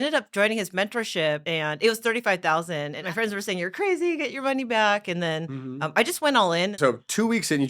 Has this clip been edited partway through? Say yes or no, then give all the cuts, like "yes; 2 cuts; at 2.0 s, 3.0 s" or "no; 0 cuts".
yes; 3 cuts; at 1.4 s, 2.9 s, 6.7 s